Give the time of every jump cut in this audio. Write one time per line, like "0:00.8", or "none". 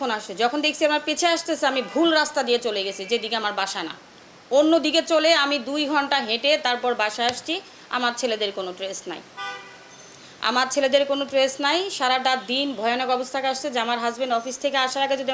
none